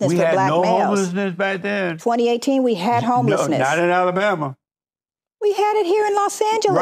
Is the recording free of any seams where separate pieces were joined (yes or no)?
yes